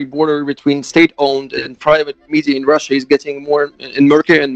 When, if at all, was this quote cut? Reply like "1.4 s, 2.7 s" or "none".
2.3 s